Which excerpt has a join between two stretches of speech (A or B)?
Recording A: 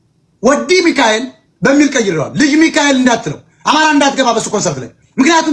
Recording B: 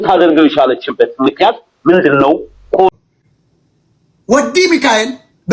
B